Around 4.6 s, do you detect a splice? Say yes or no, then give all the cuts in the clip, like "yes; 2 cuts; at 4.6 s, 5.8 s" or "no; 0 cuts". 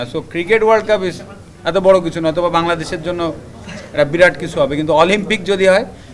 no; 0 cuts